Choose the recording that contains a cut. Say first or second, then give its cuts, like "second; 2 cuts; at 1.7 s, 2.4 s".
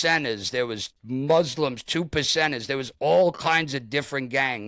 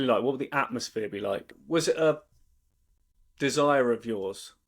second; 1 cut; at 1.6 s